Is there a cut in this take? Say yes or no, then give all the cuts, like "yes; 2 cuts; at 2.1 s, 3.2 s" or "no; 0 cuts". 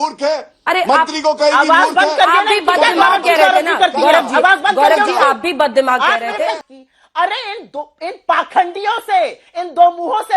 yes; 1 cut; at 6.6 s